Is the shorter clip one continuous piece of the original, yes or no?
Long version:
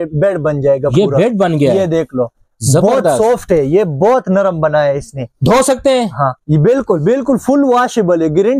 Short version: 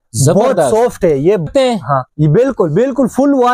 no